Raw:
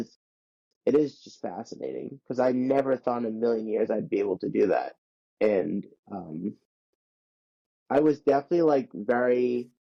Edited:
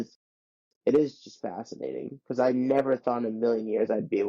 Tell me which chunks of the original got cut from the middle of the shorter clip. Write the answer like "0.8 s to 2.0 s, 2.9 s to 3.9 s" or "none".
none

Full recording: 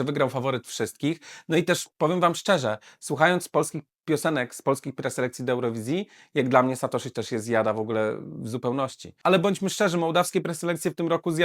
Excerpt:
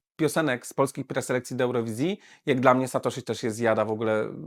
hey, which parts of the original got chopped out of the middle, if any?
none

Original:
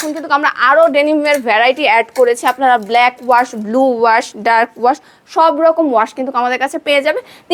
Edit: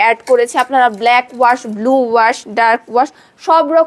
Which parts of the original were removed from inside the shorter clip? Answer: none

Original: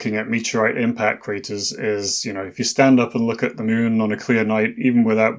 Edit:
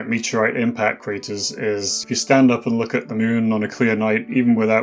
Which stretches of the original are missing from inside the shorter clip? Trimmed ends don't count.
2.2 s to 2.5 s

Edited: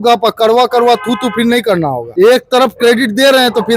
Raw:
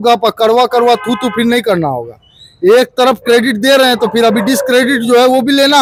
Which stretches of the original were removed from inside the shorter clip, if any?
2.0 s to 2.5 s

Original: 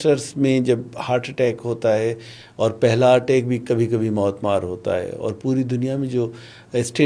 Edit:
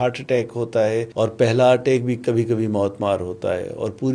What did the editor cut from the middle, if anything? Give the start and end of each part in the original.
2.2 s to 2.5 s

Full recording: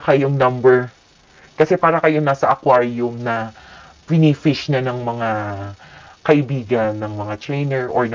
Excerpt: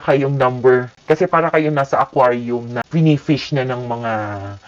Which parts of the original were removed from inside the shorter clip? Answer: 0.9 s to 1.4 s, 3.3 s to 3.9 s

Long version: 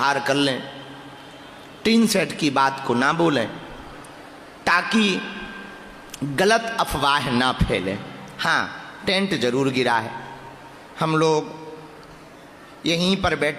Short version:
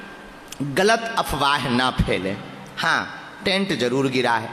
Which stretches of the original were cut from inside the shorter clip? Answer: none

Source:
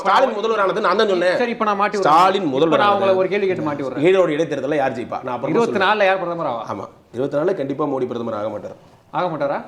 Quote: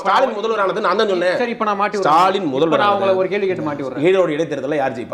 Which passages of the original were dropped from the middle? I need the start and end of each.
none

